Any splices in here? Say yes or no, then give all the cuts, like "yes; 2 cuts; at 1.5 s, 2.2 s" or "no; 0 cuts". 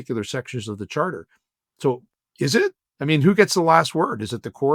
no; 0 cuts